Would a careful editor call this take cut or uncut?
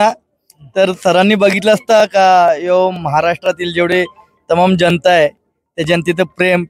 uncut